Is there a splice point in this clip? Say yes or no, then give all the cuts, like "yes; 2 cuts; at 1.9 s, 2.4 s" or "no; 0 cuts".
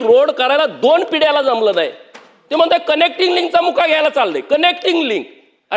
no; 0 cuts